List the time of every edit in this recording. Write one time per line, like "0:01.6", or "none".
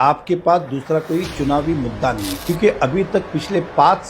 0:02.3